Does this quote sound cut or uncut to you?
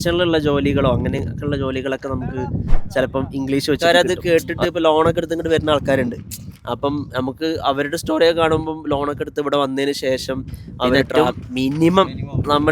cut